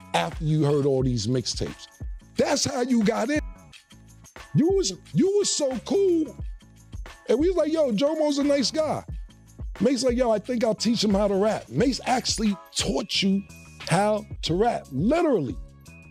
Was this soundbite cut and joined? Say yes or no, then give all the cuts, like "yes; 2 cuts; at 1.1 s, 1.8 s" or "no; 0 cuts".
no; 0 cuts